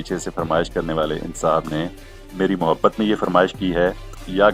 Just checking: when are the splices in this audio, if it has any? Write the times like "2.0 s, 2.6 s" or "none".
none

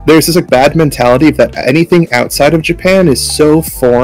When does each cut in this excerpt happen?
none

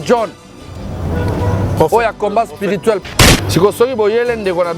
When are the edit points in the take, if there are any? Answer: 3.0 s

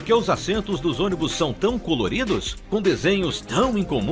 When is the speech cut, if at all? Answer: none

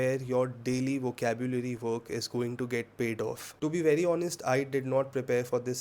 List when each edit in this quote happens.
3.5 s

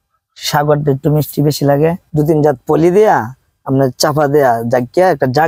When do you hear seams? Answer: 2.0 s

